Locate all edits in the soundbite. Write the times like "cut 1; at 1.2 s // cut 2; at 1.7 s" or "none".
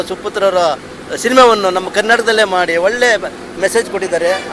none